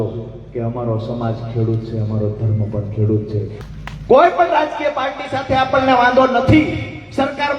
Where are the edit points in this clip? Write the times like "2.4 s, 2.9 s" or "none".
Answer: 3.6 s